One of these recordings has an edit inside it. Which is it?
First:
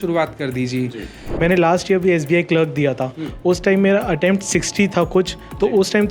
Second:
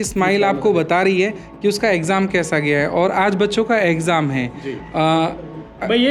first; 1 cut; at 1.2 s

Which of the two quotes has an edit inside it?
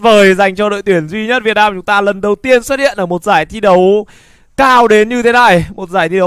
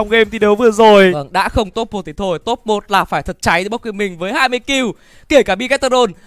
second; 1 cut; at 1.2 s

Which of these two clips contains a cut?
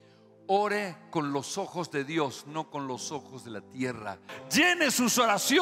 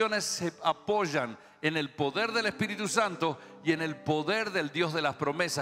first; 1 cut; at 4.3 s

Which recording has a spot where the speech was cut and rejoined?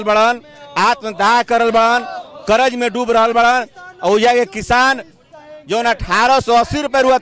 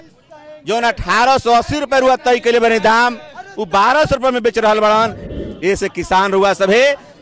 second; 1 cut; at 5.3 s

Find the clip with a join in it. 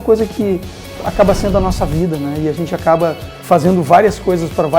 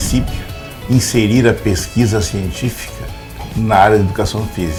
first; 1 cut; at 3.3 s

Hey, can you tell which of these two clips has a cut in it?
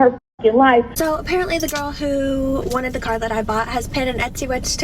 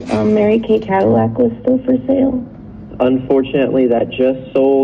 first; 1 cut; at 0.9 s

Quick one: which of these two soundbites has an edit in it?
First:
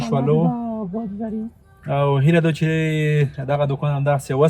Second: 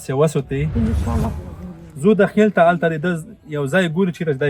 second; 1 cut; at 1.4 s

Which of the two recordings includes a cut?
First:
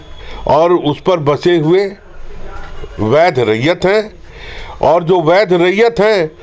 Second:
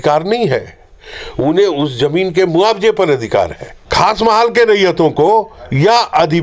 second; 1 cut; at 3.8 s

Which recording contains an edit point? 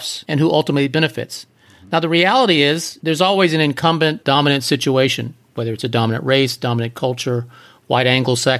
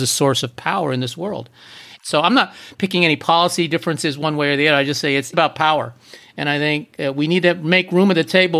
second; 1 cut; at 1.9 s

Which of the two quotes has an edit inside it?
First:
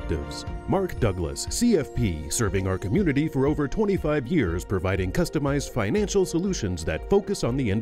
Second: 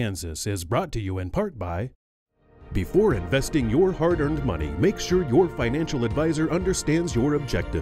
second; 1 cut; at 2.1 s

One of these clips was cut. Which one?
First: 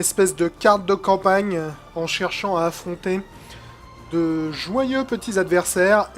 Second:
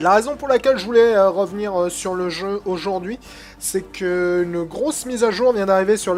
first; 1 cut; at 4.5 s

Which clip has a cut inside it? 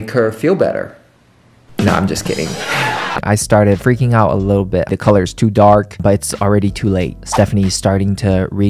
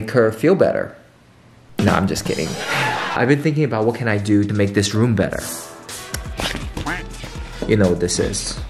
first; 2 cuts; at 3.2 s, 4.9 s

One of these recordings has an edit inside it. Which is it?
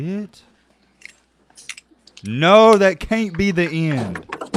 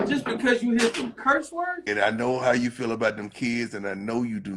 second; 1 cut; at 1.8 s

